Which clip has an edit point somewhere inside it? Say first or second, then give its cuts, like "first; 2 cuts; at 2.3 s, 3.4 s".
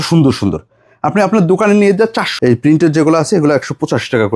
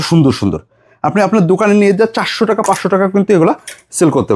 first; 1 cut; at 2.2 s